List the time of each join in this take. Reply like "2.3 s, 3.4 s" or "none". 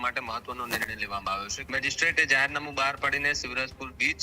1.5 s